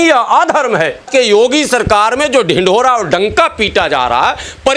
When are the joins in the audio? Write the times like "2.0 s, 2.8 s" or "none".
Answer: 1.0 s